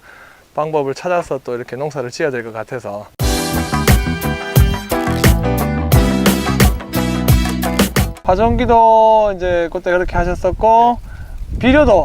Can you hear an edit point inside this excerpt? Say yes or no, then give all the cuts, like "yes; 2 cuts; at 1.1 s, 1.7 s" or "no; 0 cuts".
yes; 2 cuts; at 3.0 s, 8.1 s